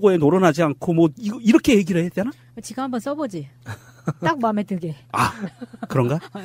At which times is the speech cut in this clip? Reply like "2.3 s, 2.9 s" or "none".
none